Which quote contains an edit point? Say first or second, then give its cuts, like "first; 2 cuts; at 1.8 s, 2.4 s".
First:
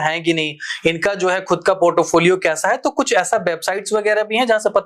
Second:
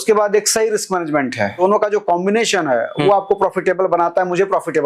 second; 1 cut; at 1.6 s